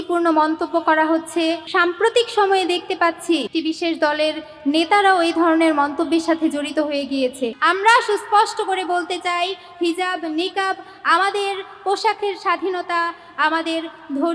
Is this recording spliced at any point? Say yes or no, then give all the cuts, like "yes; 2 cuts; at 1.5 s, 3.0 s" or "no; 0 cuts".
yes; 3 cuts; at 1.7 s, 3.5 s, 7.6 s